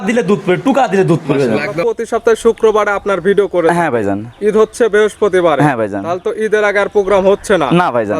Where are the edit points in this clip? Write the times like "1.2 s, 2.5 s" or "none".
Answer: 1.9 s